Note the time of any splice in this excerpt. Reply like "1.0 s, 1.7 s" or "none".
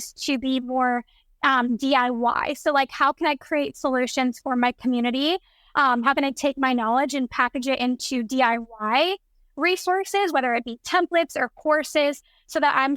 none